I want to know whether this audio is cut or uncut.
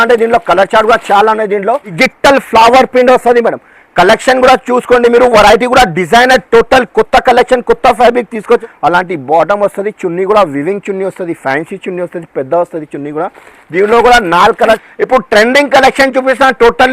cut